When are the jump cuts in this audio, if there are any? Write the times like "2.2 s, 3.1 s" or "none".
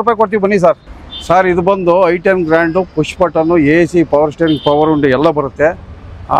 none